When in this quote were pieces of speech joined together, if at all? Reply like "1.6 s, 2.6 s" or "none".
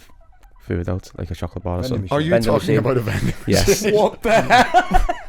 none